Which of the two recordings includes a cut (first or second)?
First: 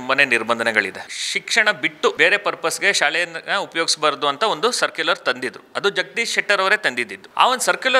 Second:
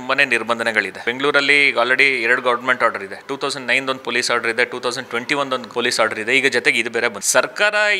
first